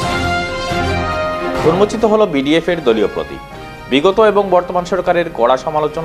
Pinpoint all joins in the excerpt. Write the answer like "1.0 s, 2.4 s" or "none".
1.6 s